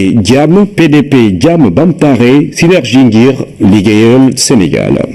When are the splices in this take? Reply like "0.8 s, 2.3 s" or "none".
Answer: none